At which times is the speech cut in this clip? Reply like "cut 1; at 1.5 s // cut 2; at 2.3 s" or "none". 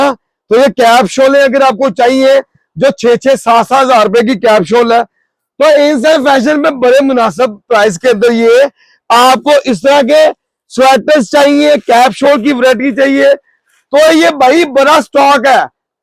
none